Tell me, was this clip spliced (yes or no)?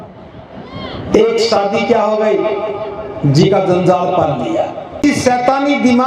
yes